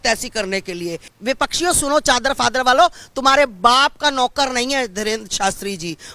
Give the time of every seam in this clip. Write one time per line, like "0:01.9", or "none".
0:01.1